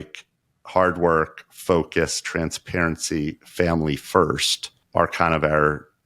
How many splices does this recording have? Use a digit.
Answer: 1